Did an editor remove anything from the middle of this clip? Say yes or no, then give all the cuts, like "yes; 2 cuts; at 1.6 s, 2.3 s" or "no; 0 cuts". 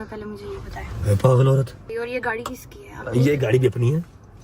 yes; 1 cut; at 1.9 s